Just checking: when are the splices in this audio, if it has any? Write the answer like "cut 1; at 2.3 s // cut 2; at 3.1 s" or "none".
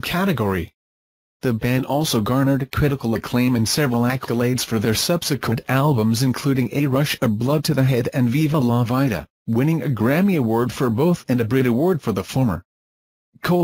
cut 1; at 9.3 s

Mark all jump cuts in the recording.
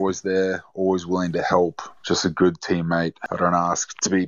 cut 1; at 1.9 s // cut 2; at 3.2 s

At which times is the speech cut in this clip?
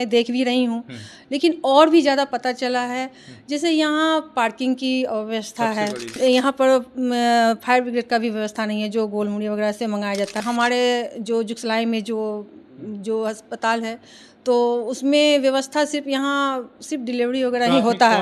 cut 1; at 6.2 s // cut 2; at 10.4 s

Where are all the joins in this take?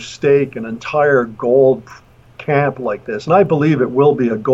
none

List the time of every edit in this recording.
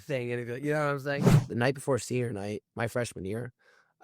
cut 1; at 1.4 s

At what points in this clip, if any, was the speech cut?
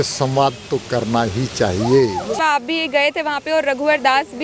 cut 1; at 2.4 s

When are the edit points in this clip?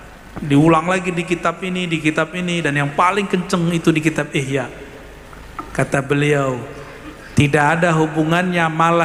none

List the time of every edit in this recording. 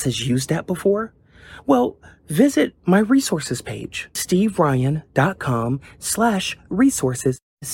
none

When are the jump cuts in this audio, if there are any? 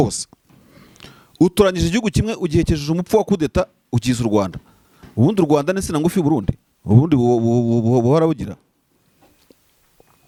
none

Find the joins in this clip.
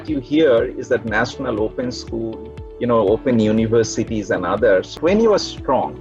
cut 1; at 4.9 s

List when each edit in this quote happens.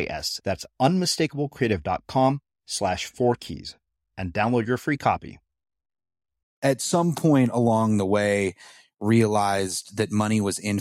cut 1; at 6.5 s

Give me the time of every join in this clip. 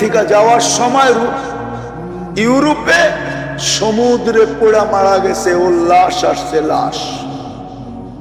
none

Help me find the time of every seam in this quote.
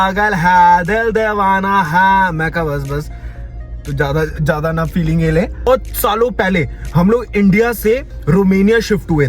cut 1; at 5.7 s

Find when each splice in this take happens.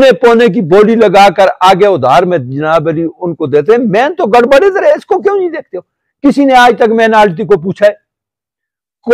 none

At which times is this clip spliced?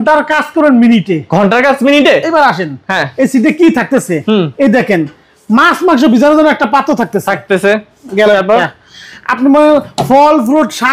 none

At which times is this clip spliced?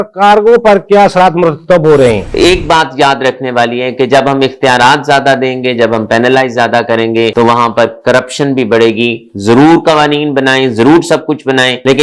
cut 1; at 2.2 s

